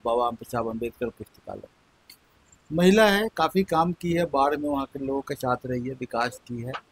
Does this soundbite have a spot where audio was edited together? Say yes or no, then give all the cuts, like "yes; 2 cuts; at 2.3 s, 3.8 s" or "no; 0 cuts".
no; 0 cuts